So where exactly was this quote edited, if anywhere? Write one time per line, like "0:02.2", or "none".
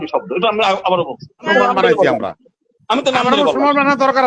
0:01.5